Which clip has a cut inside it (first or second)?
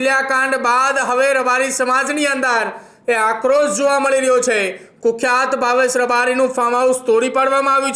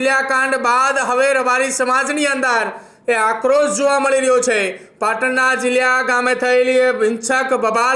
first